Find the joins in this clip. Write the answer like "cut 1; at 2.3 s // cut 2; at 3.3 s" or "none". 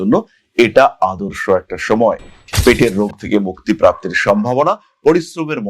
cut 1; at 2.3 s